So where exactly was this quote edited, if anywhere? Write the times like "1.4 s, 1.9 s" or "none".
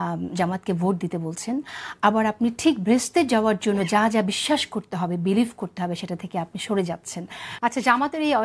7.4 s